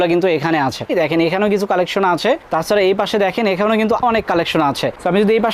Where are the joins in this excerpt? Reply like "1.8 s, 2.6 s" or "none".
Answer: 0.9 s, 4.0 s

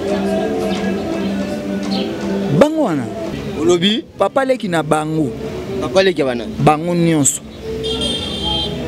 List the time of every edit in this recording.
3.3 s

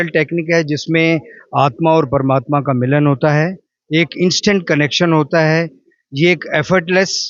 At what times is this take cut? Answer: none

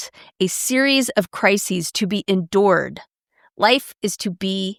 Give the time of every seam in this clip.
none

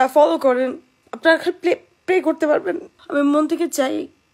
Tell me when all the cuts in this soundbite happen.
1.0 s, 2.9 s

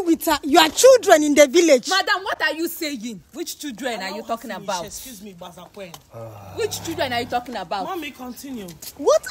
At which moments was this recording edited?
none

